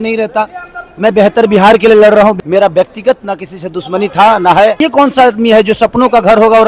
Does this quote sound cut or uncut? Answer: cut